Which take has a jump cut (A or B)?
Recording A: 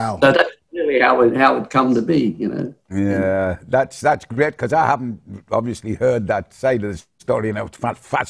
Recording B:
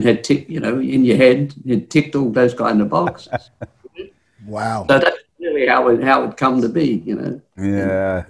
B